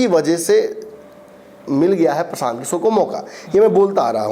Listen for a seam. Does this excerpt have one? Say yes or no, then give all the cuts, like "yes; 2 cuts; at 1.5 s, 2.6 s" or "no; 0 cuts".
no; 0 cuts